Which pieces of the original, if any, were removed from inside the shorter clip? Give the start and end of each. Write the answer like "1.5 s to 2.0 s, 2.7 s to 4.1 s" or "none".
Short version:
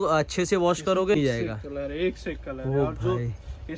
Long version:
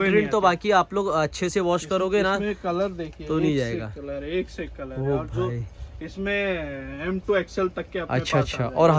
2.2 s to 3.5 s

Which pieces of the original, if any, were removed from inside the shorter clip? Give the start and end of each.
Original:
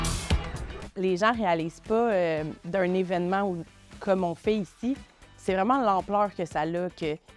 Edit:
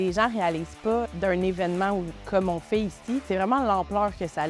2.1 s to 2.6 s, 3.7 s to 3.9 s, 5.0 s to 5.4 s

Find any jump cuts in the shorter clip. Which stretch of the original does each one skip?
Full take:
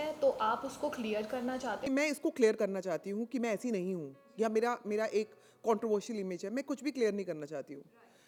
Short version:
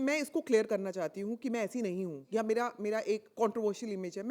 4.1 s to 4.2 s, 5.3 s to 5.5 s

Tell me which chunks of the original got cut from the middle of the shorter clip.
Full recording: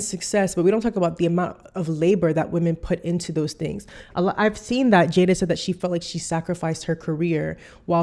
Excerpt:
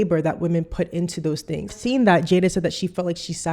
3.9 s to 4.6 s

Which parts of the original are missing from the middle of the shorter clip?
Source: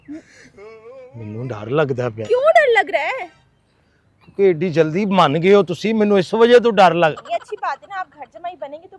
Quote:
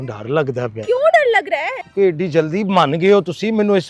3.2 s to 4.2 s

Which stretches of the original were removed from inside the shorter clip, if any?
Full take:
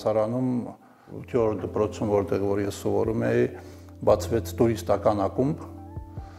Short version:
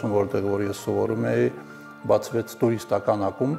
none

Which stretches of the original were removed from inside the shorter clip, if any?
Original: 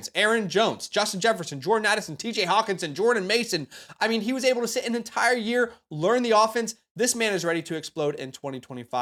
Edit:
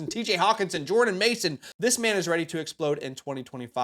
3.7 s to 6.8 s

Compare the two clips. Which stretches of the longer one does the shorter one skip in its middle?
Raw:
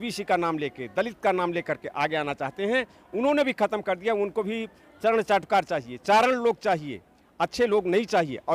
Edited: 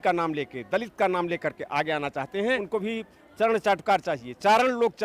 2.9 s to 4.3 s

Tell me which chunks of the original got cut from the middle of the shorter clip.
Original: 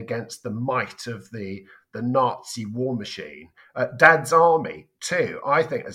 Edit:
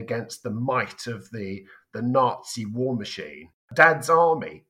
3.7 s to 3.9 s

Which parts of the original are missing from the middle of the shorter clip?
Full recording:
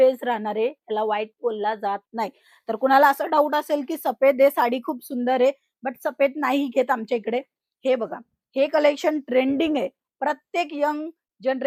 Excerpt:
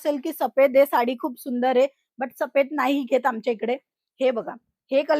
none

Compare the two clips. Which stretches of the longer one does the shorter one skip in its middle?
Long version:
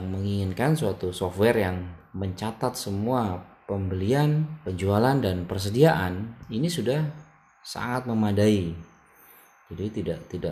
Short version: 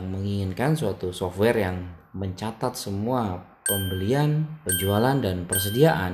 none

